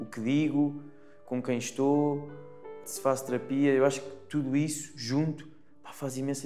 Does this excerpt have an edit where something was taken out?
yes; 1 cut; at 2.7 s

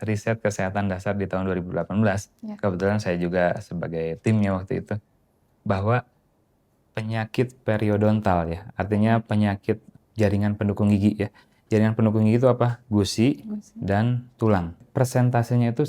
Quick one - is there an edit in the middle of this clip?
yes; 3 cuts; at 9.9 s, 12.8 s, 14.9 s

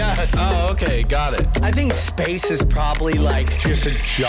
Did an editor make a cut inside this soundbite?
no; 0 cuts

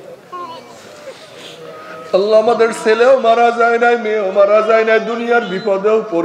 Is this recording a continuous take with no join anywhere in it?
yes; 0 cuts

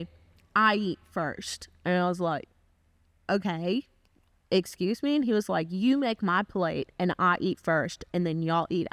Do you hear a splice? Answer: no; 0 cuts

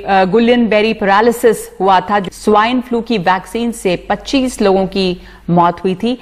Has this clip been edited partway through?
yes; 1 cut; at 2.2 s

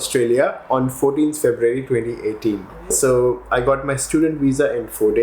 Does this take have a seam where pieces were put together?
yes; 1 cut; at 2.9 s

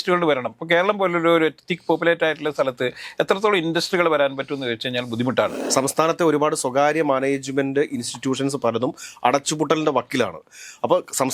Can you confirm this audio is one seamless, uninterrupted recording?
no; 1 cut; at 5.6 s

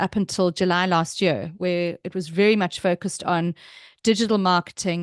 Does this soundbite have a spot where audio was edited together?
no; 0 cuts

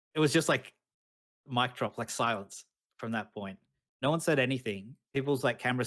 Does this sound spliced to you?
yes; 1 cut; at 4.9 s

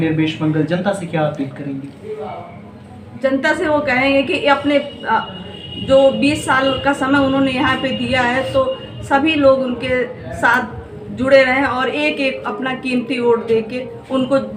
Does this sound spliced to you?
no; 0 cuts

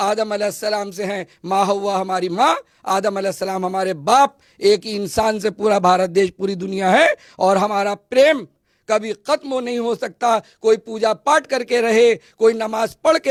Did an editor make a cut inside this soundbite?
no; 0 cuts

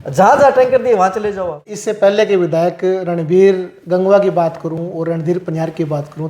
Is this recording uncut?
no; 1 cut; at 1.7 s

